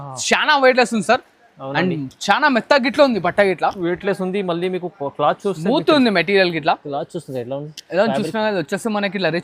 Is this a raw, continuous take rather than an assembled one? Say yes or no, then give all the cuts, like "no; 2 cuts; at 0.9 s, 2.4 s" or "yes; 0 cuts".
yes; 0 cuts